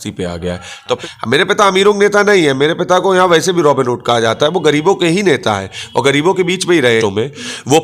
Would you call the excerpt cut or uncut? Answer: cut